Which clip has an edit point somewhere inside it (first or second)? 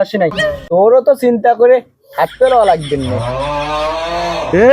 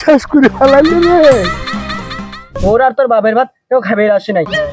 second